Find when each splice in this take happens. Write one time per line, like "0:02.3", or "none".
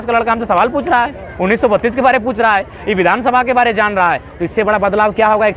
none